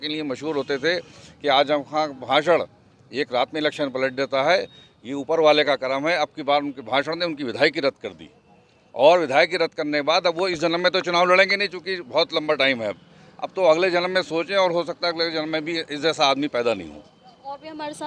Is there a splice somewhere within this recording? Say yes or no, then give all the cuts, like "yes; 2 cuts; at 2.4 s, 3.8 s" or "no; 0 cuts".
no; 0 cuts